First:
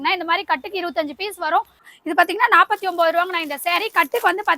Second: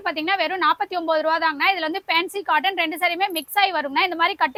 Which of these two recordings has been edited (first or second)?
first